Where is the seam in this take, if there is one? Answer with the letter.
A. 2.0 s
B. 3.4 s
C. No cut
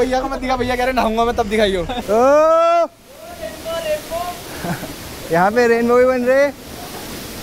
A